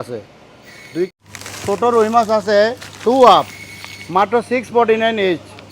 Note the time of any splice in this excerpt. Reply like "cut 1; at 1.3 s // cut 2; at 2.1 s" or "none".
cut 1; at 1.1 s